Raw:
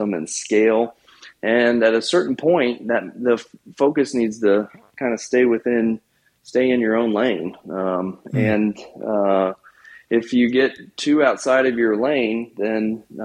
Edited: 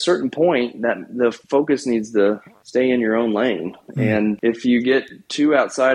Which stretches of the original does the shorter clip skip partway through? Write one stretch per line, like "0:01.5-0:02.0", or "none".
0:03.5-0:03.7
0:04.8-0:06.3
0:07.7-0:09.6